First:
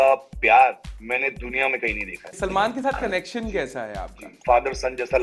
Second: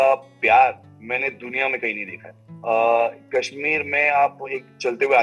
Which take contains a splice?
first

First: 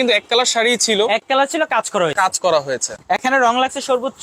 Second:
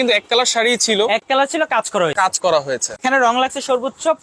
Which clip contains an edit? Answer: second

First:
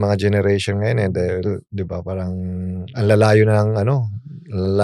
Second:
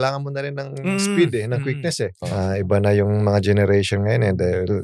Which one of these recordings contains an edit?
second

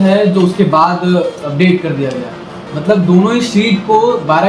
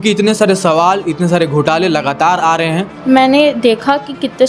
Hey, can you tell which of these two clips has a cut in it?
second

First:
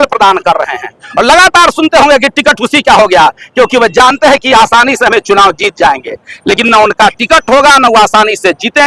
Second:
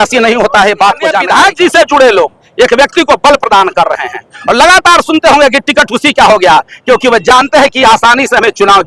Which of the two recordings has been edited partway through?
second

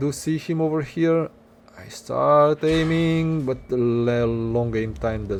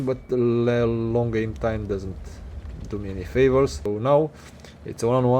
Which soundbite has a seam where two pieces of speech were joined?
second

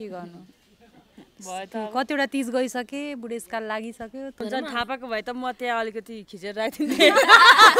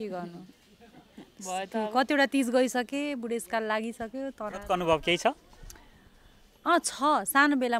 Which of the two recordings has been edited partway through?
first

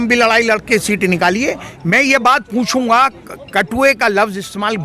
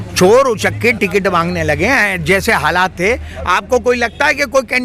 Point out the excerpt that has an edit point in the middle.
first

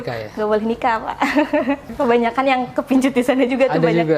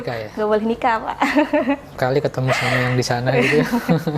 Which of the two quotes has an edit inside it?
first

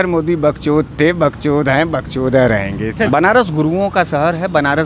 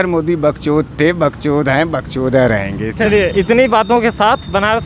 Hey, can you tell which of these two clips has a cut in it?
first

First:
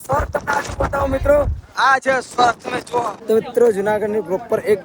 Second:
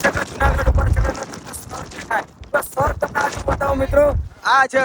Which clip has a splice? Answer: first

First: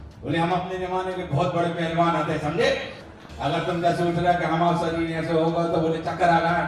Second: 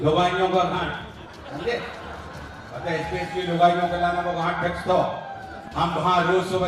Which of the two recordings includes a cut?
first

